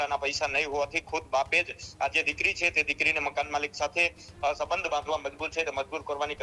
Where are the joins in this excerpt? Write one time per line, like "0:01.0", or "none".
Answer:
none